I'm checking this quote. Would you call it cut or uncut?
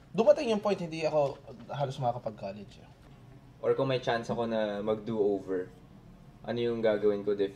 cut